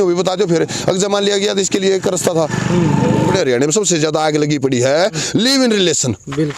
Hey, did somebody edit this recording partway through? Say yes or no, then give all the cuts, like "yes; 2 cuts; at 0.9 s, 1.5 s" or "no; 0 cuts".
yes; 1 cut; at 3.3 s